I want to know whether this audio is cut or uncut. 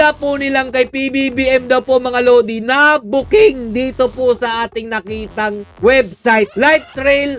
uncut